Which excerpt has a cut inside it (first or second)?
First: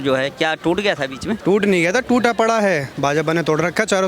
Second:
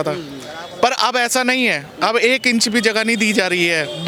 first